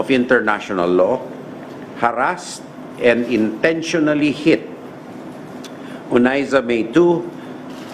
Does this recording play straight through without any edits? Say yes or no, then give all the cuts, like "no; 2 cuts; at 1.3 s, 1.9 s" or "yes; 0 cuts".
yes; 0 cuts